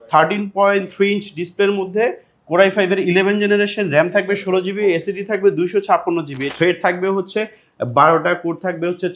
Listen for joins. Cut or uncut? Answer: cut